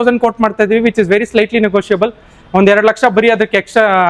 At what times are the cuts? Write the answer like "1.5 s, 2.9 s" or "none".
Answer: none